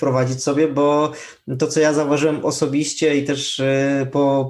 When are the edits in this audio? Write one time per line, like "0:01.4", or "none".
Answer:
none